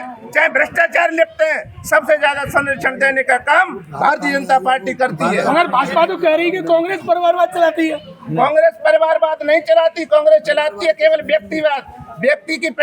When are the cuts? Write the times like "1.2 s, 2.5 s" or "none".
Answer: none